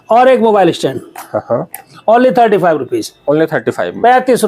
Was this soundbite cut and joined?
no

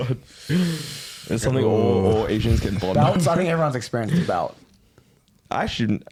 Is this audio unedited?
yes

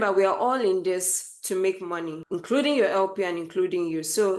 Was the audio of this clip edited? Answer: no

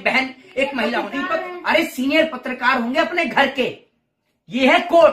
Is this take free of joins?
no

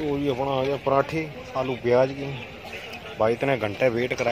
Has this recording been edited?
no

